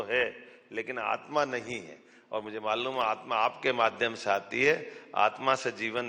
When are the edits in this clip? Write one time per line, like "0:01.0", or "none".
none